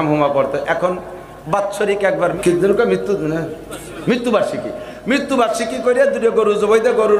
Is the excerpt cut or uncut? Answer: cut